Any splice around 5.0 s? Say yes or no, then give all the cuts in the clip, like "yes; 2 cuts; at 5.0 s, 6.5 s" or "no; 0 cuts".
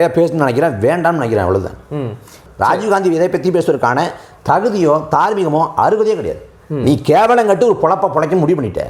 no; 1 cut; at 2.4 s